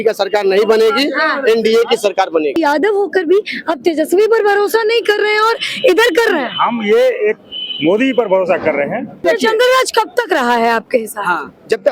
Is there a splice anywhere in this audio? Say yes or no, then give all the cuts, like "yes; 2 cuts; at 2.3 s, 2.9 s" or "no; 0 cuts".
yes; 2 cuts; at 2.6 s, 9.2 s